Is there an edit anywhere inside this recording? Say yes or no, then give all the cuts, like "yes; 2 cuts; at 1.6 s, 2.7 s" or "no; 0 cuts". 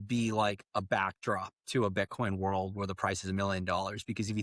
no; 0 cuts